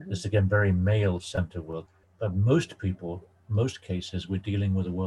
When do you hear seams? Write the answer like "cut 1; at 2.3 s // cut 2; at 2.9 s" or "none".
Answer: cut 1; at 1.9 s